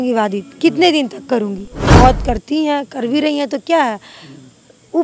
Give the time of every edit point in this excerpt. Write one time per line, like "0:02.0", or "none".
0:02.0